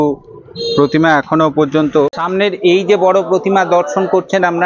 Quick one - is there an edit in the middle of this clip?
yes; 1 cut; at 2.2 s

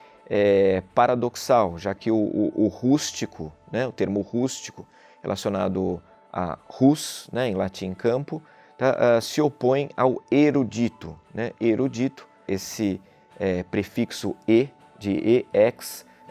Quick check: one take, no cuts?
no; 1 cut; at 12.5 s

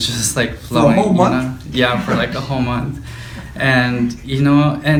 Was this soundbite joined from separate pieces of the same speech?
no; 0 cuts

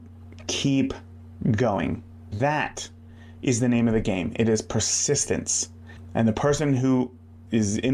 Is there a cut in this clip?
yes; 1 cut; at 2.3 s

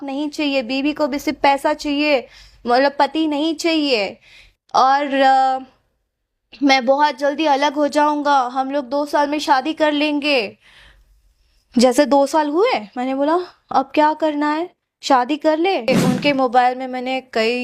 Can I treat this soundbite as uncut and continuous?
no; 1 cut; at 15.9 s

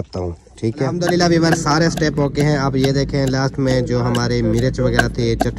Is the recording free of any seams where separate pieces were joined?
no; 1 cut; at 0.9 s

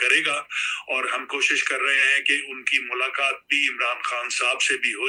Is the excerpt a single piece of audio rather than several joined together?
yes; 0 cuts

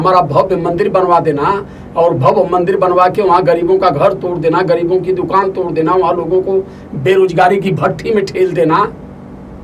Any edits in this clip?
no; 0 cuts

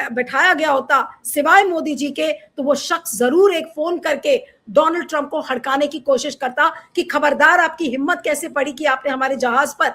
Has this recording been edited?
no; 0 cuts

